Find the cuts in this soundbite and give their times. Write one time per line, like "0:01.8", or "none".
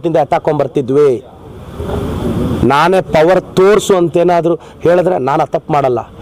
none

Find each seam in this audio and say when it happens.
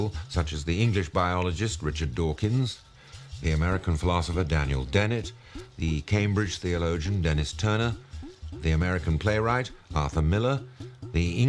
0:05.2

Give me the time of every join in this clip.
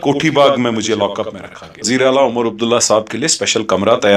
0:01.9

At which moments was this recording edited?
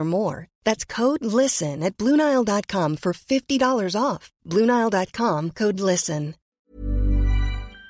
0:06.6

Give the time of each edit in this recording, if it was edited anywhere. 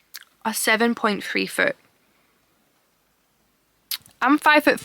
none

